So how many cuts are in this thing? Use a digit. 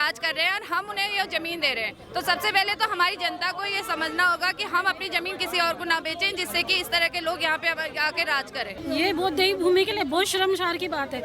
1